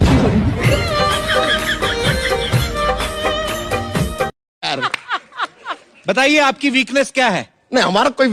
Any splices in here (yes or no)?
yes